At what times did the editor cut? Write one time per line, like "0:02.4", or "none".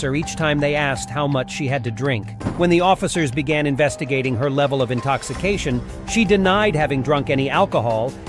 none